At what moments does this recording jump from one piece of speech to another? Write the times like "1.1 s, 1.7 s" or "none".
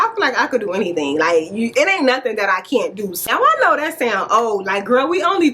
3.3 s